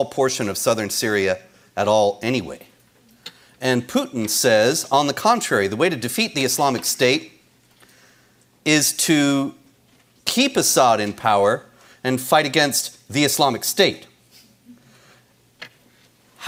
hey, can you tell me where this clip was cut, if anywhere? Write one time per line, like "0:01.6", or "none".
none